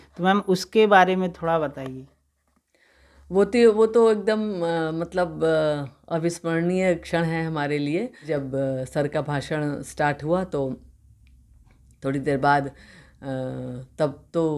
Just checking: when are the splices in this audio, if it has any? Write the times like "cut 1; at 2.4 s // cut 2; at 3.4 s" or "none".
cut 1; at 8.3 s